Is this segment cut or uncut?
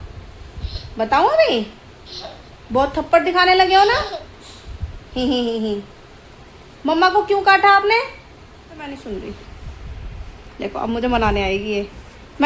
cut